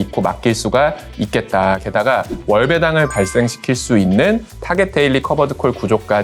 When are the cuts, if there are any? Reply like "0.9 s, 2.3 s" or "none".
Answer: none